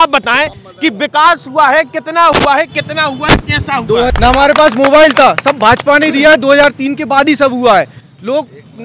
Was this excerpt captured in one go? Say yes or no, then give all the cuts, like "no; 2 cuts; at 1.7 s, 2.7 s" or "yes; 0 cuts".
no; 1 cut; at 4.1 s